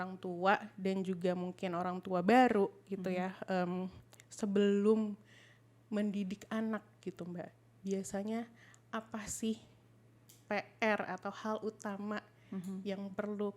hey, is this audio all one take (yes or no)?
yes